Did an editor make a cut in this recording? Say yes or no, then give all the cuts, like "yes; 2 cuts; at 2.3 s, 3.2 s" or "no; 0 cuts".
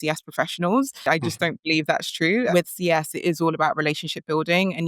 yes; 2 cuts; at 1.1 s, 2.5 s